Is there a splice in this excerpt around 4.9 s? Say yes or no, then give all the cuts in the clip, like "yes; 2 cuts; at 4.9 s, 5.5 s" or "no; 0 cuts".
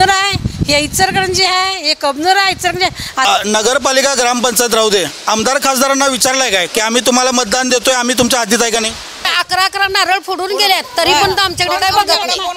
no; 2 cuts; at 3.3 s, 9.3 s